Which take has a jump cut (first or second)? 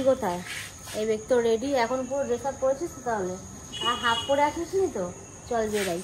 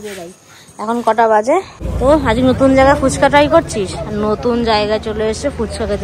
second